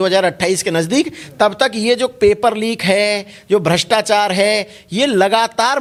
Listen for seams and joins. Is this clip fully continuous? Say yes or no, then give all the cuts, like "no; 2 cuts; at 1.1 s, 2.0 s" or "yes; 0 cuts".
yes; 0 cuts